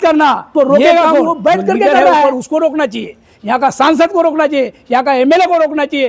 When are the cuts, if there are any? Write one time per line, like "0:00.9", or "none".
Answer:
0:02.2